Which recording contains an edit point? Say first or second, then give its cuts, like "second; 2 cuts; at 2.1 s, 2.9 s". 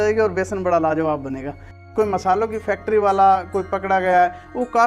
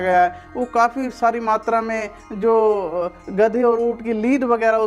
first; 1 cut; at 1.5 s